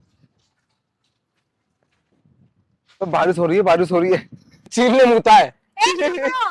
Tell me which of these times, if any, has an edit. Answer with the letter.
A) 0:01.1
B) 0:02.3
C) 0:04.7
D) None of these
C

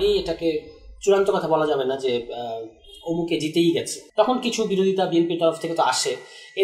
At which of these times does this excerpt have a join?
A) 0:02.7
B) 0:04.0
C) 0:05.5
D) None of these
B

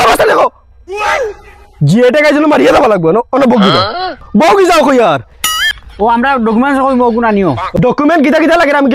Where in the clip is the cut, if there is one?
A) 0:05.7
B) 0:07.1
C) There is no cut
A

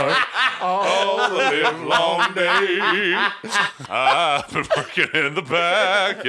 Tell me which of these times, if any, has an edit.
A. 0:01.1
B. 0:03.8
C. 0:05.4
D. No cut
B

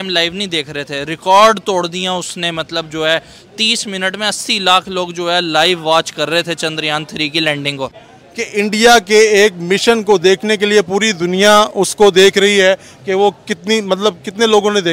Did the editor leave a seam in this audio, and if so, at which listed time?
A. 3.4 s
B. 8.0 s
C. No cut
B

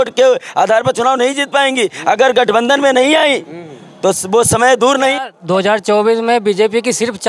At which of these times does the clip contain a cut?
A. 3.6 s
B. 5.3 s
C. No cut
B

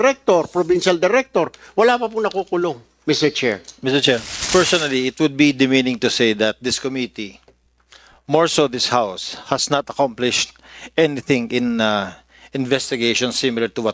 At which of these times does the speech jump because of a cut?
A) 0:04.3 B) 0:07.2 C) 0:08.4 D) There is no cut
A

